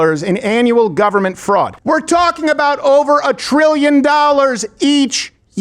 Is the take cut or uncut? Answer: cut